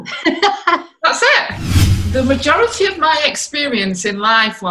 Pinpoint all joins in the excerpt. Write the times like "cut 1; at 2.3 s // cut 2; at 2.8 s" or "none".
cut 1; at 2.0 s

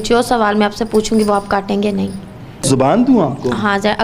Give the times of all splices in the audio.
cut 1; at 2.7 s

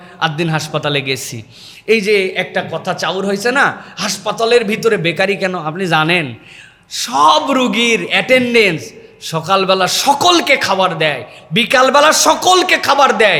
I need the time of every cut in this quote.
none

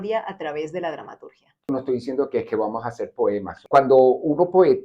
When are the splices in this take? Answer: cut 1; at 1.7 s // cut 2; at 3.6 s

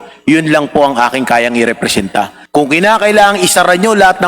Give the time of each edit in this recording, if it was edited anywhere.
cut 1; at 2.4 s

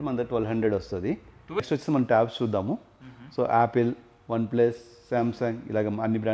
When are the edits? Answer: cut 1; at 1.6 s

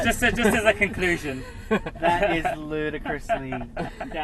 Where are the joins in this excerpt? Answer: none

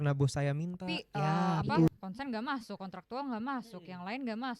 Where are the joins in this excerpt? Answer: cut 1; at 1.9 s

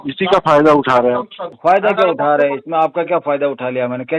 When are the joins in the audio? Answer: cut 1; at 1.4 s

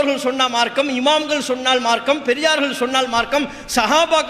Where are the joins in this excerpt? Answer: none

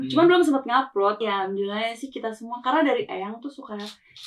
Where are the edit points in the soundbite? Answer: cut 1; at 1.2 s

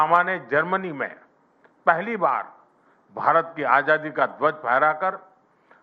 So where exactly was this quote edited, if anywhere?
none

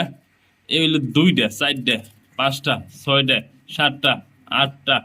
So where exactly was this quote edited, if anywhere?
none

